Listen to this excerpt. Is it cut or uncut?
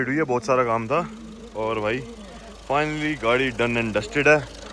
uncut